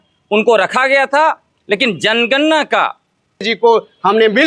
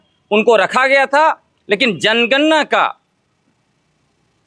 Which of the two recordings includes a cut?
first; 1 cut; at 3.5 s

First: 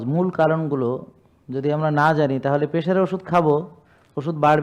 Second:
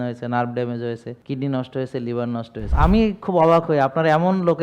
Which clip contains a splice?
second; 2 cuts; at 1.1 s, 2.6 s

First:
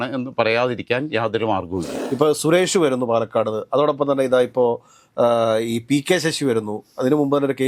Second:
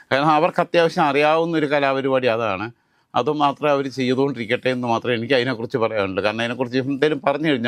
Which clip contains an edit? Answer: first; 1 cut; at 1.9 s

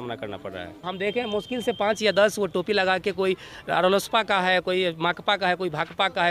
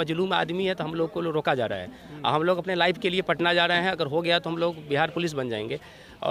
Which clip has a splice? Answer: first; 1 cut; at 0.9 s

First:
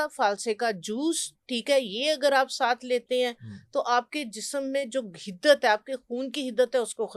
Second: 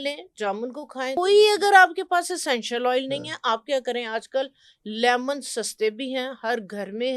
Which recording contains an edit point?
second; 1 cut; at 1.2 s

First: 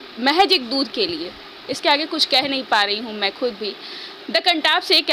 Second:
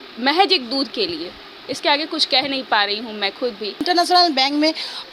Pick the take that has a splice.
second; 1 cut; at 3.8 s

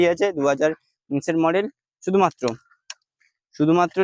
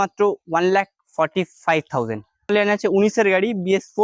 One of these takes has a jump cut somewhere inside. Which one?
second; 1 cut; at 2.5 s

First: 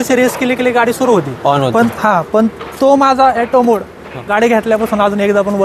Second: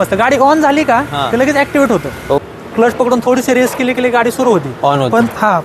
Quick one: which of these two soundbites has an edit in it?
second; 1 cut; at 2.4 s

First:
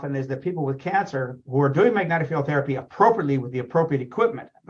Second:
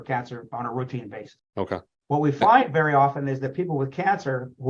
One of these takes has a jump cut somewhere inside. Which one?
second; 1 cut; at 1.7 s

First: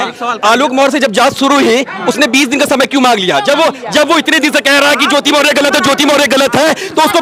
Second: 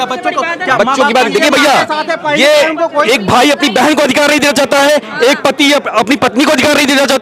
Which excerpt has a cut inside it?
second; 1 cut; at 3.1 s

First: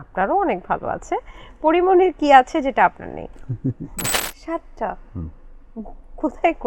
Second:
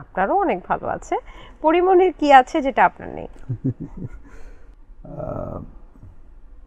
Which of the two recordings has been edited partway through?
first; 1 cut; at 4.3 s

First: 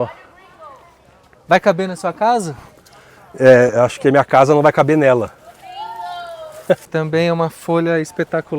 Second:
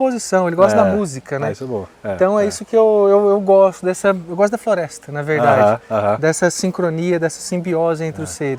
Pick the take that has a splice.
first; 1 cut; at 6.8 s

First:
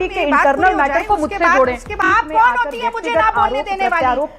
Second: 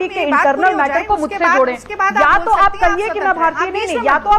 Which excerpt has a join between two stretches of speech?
first; 1 cut; at 1.9 s

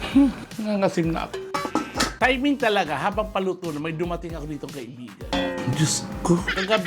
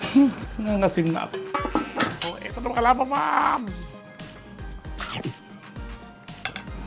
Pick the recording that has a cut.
first; 1 cut; at 2.1 s

